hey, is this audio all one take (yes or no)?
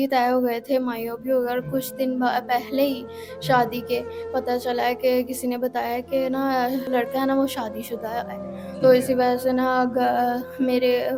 yes